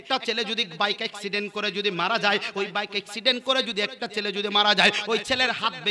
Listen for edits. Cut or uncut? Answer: uncut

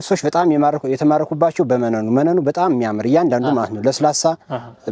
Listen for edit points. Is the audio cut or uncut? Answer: uncut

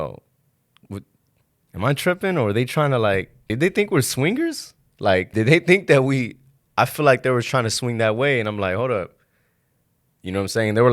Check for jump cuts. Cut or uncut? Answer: cut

